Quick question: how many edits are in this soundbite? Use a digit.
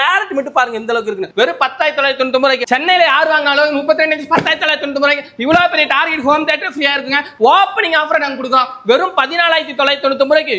2